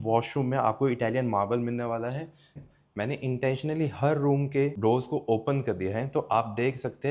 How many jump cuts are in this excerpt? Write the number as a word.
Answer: two